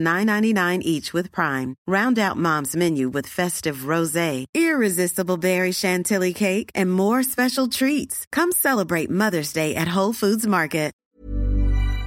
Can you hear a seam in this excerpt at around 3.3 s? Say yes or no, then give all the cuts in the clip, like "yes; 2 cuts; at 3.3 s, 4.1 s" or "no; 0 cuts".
no; 1 cut; at 11.0 s